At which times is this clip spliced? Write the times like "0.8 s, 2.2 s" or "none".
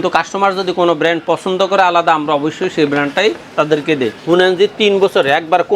4.2 s